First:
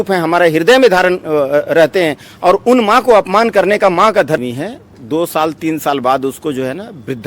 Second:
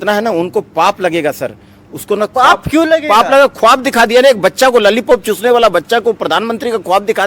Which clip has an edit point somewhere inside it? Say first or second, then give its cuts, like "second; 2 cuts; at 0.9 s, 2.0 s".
first; 1 cut; at 4.4 s